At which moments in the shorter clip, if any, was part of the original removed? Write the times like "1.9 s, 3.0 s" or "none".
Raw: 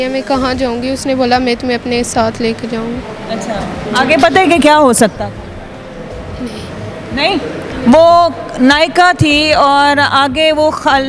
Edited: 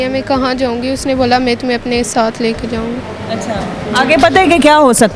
none